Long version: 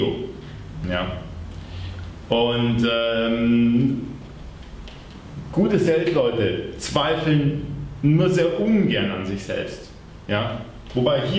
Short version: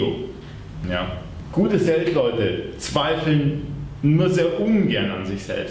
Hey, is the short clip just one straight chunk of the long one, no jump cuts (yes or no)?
no